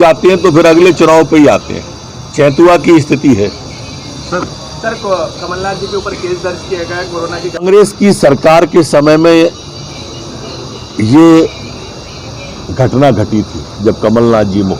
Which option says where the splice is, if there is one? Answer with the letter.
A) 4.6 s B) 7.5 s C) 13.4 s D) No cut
B